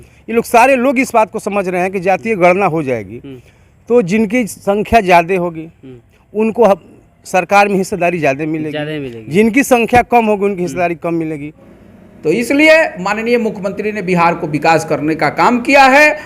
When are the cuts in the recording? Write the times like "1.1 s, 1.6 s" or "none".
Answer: 11.7 s